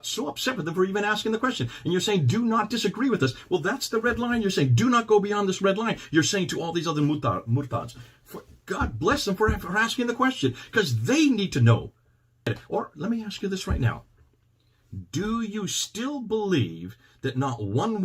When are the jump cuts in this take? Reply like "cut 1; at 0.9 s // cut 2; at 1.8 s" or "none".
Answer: cut 1; at 12.6 s